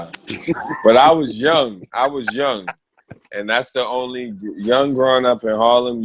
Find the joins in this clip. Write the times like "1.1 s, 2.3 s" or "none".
none